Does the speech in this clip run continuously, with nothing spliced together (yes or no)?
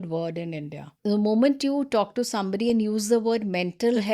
no